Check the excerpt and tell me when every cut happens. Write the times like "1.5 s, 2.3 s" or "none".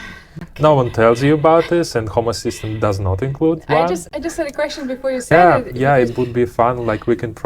5.3 s